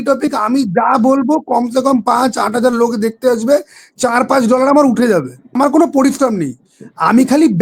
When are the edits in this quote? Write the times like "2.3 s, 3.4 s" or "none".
5.6 s